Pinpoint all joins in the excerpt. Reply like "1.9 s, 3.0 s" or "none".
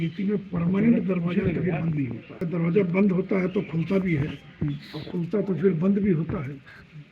2.4 s